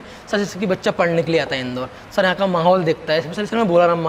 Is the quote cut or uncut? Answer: uncut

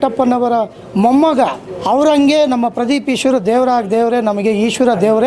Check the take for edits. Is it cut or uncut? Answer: cut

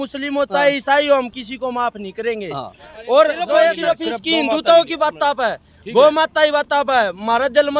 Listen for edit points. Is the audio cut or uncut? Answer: cut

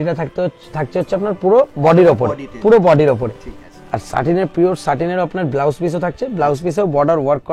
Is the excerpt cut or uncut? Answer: uncut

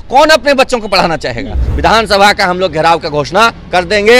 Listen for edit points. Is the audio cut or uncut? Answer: cut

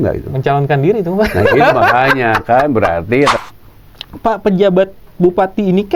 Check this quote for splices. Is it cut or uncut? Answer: cut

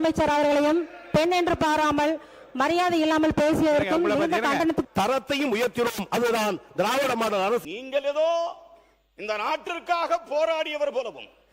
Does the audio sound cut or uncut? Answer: cut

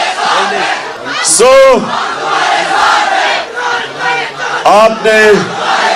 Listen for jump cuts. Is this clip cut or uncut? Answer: cut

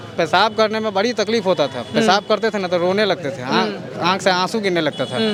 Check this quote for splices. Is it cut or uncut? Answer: uncut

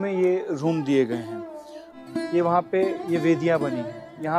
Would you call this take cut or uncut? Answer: cut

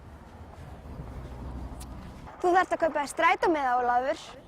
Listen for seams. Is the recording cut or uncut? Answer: cut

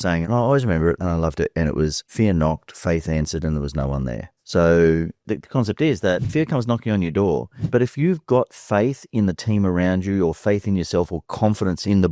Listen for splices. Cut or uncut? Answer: cut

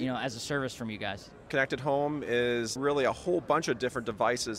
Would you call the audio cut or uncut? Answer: cut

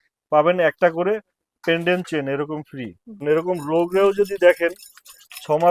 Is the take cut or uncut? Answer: cut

